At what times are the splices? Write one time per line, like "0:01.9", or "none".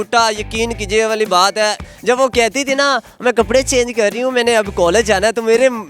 0:01.9